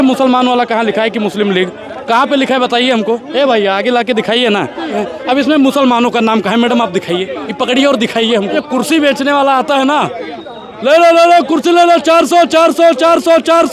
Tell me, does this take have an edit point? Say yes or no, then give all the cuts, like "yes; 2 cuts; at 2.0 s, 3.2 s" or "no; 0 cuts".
yes; 2 cuts; at 5.0 s, 8.6 s